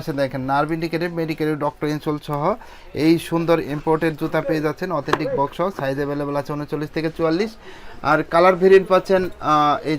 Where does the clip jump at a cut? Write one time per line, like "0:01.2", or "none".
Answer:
none